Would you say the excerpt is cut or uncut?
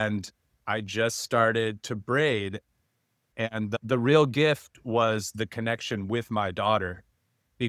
cut